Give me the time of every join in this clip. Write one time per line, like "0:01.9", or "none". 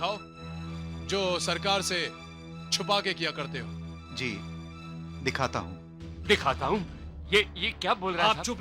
none